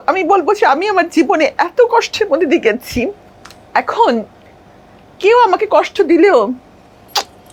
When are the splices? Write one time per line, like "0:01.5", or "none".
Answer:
none